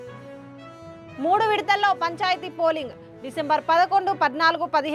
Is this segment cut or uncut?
uncut